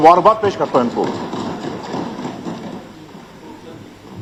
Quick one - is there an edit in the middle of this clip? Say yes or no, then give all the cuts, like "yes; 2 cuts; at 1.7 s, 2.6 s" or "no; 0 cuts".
no; 0 cuts